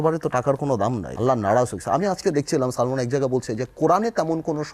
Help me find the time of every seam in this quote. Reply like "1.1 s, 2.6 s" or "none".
1.1 s